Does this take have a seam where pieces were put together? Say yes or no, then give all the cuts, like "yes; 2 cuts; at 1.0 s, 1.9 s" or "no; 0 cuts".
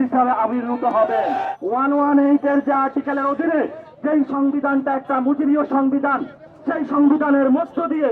yes; 2 cuts; at 1.5 s, 3.8 s